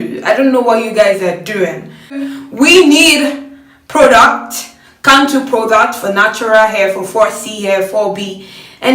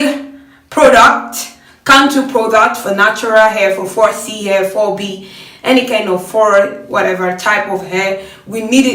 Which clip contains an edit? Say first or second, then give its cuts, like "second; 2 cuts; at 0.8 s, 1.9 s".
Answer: first; 1 cut; at 2.3 s